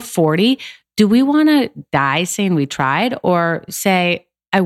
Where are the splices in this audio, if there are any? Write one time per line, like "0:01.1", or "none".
none